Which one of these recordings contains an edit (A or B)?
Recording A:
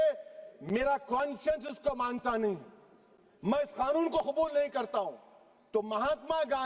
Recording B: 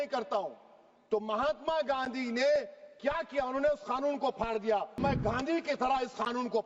B